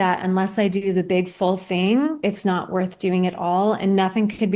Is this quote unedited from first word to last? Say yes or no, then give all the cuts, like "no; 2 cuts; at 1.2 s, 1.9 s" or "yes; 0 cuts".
no; 1 cut; at 2.2 s